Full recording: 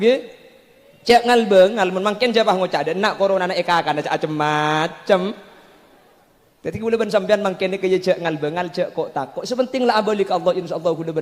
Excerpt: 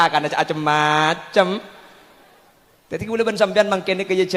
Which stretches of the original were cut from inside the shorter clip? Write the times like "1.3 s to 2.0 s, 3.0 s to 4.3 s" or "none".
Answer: none